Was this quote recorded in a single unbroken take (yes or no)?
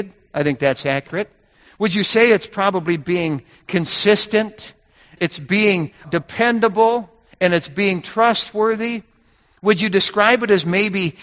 no